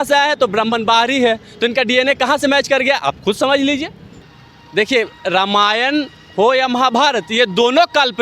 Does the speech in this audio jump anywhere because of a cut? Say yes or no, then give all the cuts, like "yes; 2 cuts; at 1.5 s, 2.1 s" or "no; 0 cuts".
yes; 1 cut; at 4.0 s